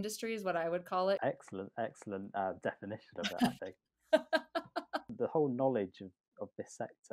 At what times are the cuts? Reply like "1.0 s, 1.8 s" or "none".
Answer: 1.2 s, 5.1 s